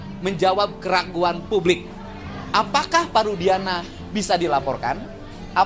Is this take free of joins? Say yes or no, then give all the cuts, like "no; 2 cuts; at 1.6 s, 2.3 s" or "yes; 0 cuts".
yes; 0 cuts